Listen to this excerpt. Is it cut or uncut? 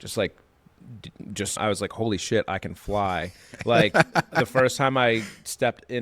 cut